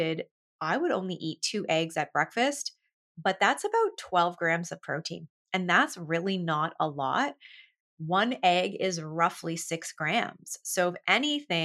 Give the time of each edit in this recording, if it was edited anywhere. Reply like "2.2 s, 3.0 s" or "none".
none